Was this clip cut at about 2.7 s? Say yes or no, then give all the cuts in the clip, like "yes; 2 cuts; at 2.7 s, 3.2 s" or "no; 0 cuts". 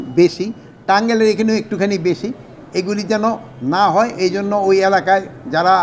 no; 0 cuts